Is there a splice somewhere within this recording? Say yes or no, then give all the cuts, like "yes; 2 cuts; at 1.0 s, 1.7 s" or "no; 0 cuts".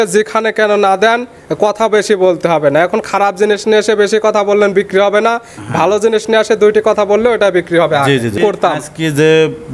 yes; 1 cut; at 8.4 s